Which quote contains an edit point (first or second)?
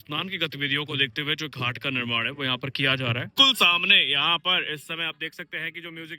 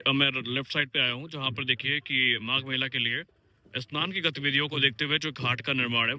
first